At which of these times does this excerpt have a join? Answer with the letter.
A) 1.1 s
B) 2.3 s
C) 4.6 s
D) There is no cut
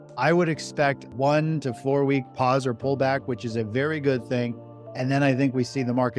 A